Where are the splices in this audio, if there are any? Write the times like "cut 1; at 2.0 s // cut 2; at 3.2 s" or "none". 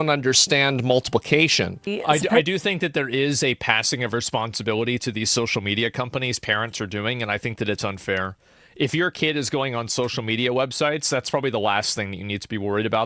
cut 1; at 1.9 s